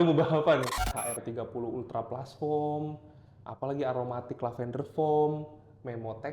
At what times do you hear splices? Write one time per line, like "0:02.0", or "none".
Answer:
0:00.9